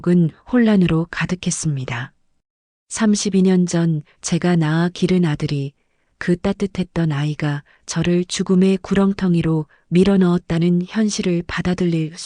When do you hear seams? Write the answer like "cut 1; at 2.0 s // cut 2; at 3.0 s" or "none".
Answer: none